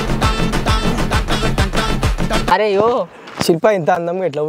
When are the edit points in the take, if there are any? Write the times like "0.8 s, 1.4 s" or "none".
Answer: 2.5 s, 3.6 s